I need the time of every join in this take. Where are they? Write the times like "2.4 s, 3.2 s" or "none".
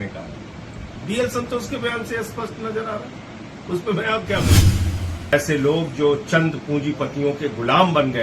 4.6 s